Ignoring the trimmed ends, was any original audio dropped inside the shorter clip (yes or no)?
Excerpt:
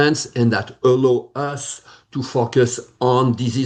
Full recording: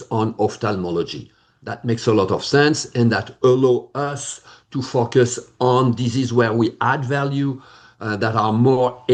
no